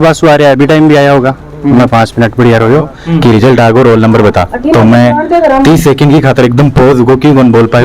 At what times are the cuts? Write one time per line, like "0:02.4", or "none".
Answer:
0:03.0